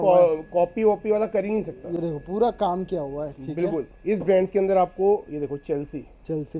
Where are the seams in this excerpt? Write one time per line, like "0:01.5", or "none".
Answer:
none